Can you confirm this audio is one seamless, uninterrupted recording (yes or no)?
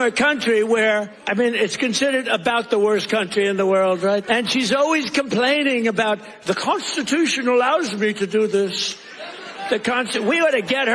no